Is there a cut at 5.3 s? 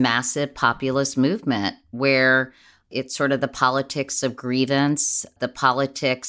yes; 2 cuts; at 2.9 s, 5.3 s

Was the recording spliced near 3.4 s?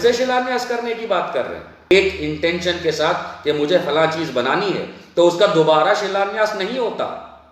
no; 1 cut; at 1.9 s

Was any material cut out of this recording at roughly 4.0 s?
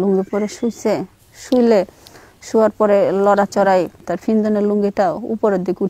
yes; 1 cut; at 4.0 s

